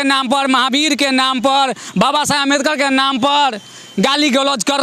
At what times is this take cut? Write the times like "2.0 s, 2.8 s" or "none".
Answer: none